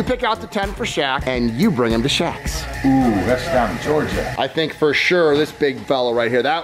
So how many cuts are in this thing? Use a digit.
2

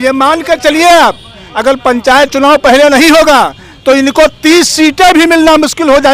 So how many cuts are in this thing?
0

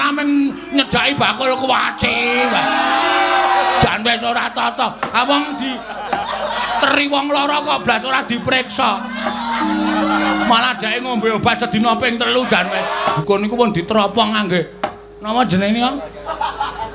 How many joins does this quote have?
3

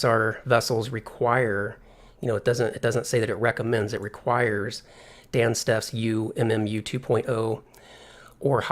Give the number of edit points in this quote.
1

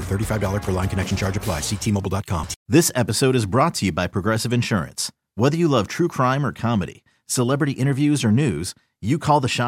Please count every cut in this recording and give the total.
1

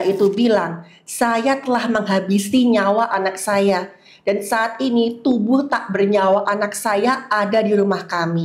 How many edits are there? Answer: 0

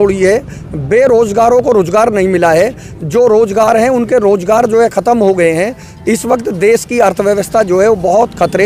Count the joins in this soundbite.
0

